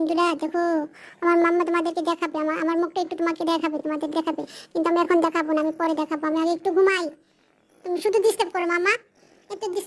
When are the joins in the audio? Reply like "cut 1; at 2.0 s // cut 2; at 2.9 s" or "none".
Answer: none